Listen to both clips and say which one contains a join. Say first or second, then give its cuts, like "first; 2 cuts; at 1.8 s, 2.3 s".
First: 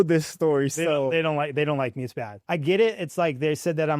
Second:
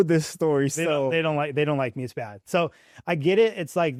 first; 1 cut; at 2.3 s